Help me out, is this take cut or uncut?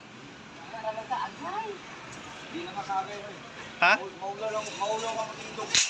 uncut